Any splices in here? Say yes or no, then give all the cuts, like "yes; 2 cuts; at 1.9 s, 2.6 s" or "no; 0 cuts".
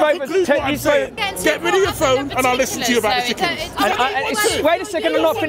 yes; 2 cuts; at 1.2 s, 3.6 s